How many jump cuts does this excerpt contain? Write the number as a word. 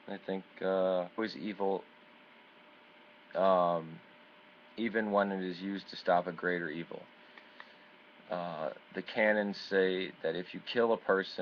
zero